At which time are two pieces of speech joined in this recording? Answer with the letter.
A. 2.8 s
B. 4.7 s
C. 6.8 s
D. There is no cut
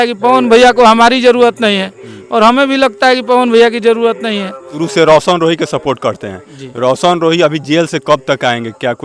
B